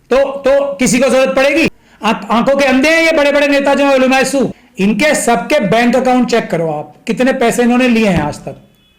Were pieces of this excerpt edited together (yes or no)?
yes